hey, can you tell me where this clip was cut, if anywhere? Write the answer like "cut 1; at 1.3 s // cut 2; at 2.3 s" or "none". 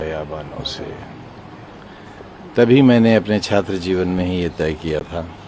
none

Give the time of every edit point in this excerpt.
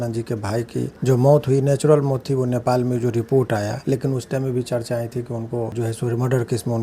cut 1; at 0.9 s // cut 2; at 5.7 s

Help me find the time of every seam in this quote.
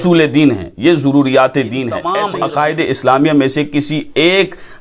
cut 1; at 2.1 s

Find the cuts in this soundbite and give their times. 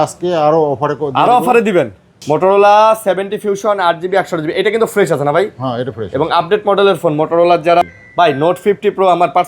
cut 1; at 2.2 s // cut 2; at 7.8 s

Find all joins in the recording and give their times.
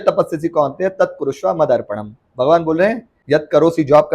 cut 1; at 3.1 s

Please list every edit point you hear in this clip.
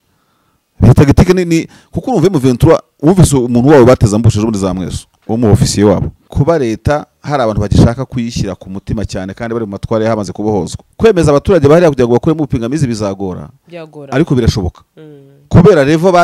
cut 1; at 6.2 s // cut 2; at 10.8 s

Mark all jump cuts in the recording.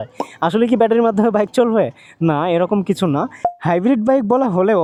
none

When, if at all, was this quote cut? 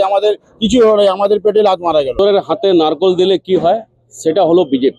cut 1; at 2.2 s

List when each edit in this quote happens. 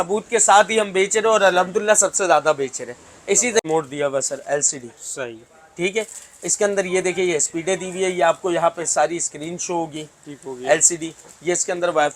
cut 1; at 3.6 s

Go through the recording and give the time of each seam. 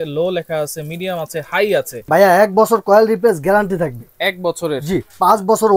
cut 1; at 2.0 s

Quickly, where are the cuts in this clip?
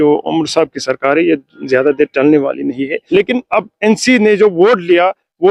cut 1; at 2.9 s

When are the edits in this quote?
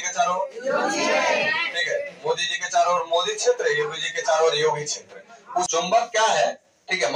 cut 1; at 5.7 s

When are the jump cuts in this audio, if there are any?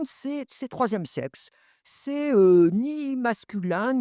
none

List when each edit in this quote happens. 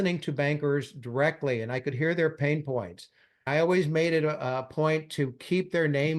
cut 1; at 3.5 s

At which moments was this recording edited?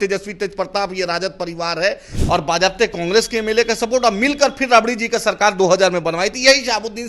cut 1; at 2.2 s

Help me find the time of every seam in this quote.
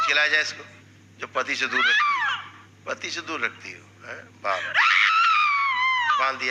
none

